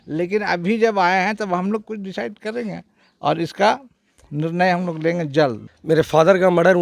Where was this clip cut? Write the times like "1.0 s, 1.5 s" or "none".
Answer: 5.7 s